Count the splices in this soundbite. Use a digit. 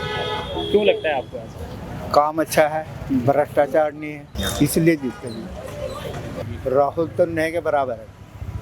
1